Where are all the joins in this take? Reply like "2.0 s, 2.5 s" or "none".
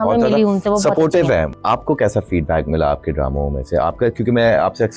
1.5 s